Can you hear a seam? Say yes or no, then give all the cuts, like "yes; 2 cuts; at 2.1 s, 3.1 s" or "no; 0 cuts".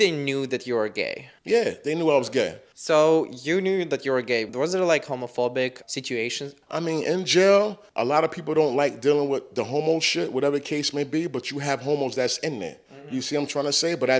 no; 0 cuts